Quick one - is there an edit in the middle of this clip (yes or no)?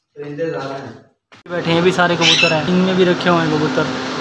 yes